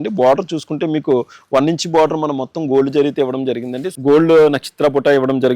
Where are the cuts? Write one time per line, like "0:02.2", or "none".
0:03.8